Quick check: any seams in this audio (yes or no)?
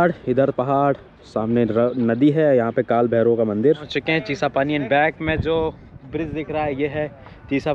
yes